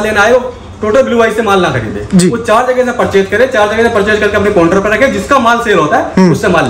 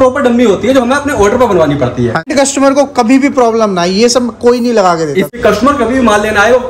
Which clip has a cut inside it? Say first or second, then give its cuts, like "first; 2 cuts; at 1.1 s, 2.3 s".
second; 2 cuts; at 2.3 s, 5.3 s